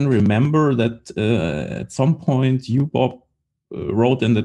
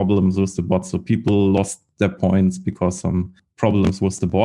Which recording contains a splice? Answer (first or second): second